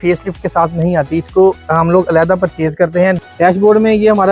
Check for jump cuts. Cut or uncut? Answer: cut